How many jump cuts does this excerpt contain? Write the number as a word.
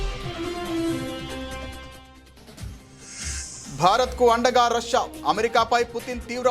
one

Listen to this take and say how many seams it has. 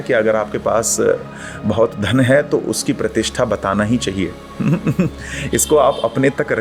zero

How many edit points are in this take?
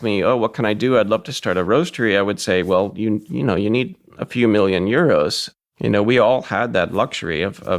one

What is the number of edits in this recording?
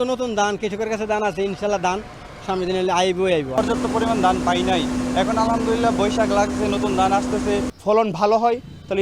two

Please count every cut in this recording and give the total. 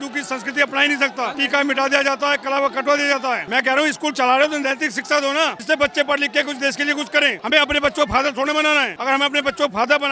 five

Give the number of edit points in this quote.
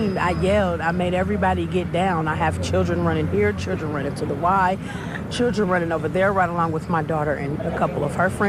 zero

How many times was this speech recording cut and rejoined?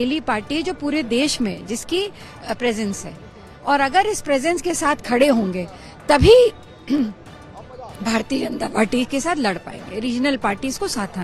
zero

